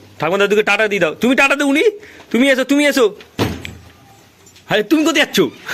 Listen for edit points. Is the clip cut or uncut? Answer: uncut